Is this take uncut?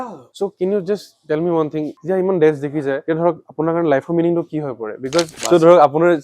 no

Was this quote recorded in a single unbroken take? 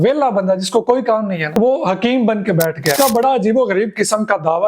no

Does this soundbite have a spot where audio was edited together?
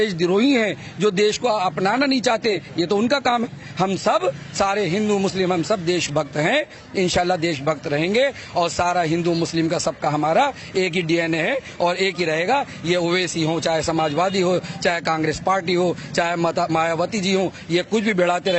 yes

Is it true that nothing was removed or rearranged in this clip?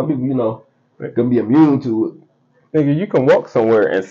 yes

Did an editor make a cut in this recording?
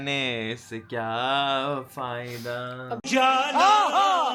no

